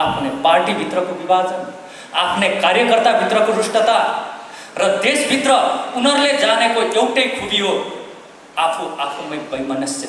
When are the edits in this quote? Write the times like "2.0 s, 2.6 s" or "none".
none